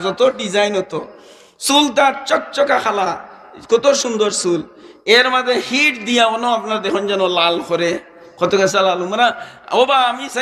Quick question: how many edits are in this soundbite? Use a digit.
0